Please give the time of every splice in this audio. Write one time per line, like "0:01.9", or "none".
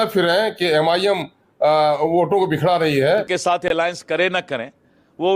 0:03.3